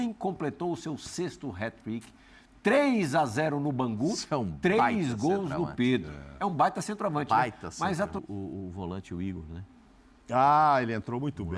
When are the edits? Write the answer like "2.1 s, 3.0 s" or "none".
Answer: 8.2 s